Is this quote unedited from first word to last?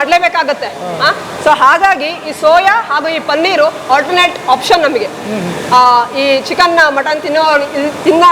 yes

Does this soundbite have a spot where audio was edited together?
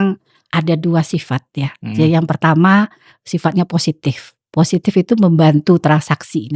no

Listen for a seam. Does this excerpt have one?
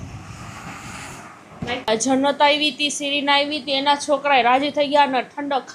yes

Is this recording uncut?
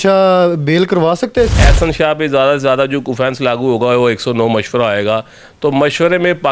no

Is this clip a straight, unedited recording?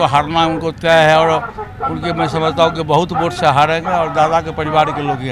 yes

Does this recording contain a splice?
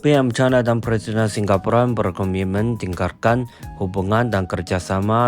no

